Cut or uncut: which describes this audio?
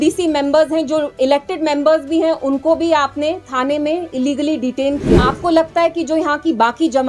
cut